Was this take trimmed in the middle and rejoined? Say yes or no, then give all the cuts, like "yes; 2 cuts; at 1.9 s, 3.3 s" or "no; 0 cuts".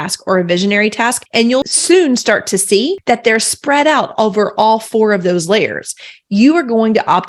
yes; 1 cut; at 1.2 s